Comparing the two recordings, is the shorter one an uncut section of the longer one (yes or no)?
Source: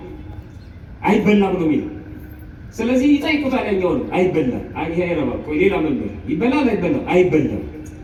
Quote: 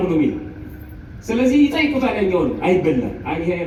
yes